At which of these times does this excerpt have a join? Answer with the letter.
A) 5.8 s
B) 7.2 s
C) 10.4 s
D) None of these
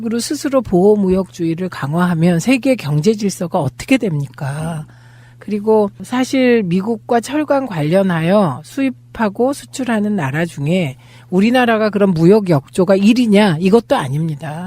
B